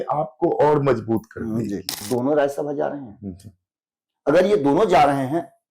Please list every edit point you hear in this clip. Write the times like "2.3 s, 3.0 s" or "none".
1.9 s

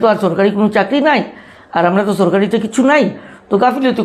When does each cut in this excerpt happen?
none

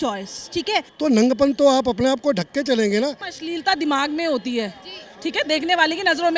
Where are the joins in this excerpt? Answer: 0.9 s, 3.3 s

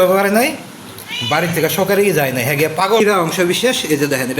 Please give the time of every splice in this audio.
3.0 s

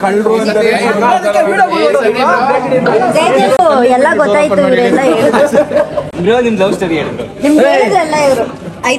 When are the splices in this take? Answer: none

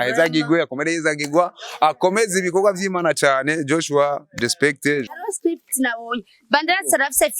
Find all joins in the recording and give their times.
5.2 s

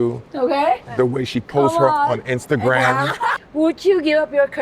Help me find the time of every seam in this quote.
3.4 s

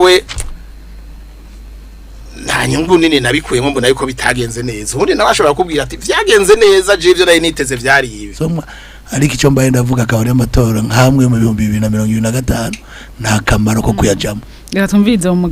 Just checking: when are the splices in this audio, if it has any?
8.4 s

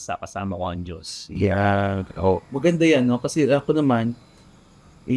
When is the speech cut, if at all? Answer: none

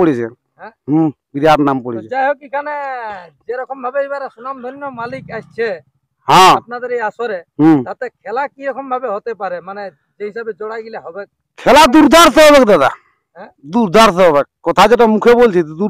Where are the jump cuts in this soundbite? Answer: none

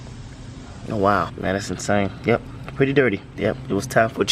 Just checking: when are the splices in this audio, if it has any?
1.3 s, 3.3 s

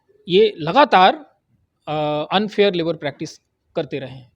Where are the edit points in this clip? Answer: none

